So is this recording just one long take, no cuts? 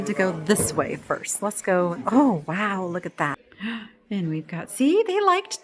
no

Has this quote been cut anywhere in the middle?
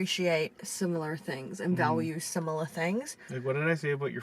yes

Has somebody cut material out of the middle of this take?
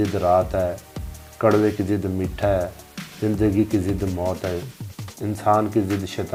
no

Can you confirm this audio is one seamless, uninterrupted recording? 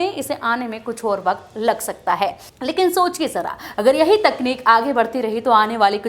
no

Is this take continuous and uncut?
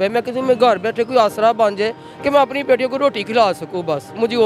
yes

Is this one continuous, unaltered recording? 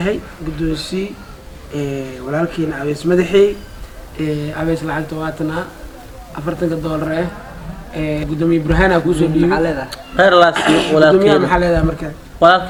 yes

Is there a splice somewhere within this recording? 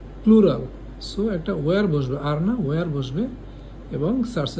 no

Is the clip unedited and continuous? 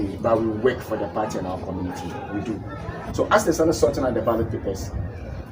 no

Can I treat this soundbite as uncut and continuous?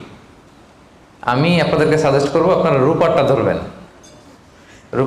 yes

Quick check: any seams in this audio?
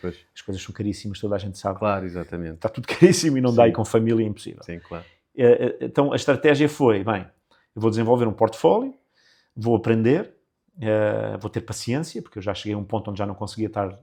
no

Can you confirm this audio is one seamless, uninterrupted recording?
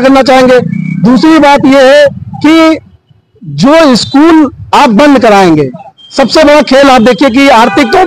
yes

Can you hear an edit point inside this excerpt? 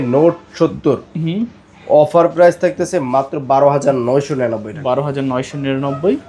no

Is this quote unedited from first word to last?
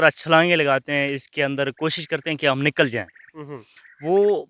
yes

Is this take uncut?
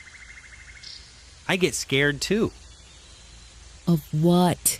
yes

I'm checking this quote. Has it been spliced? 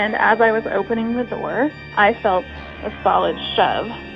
yes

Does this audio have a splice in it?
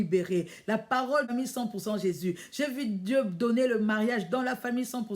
yes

